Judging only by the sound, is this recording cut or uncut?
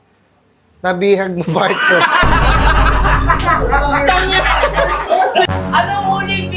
cut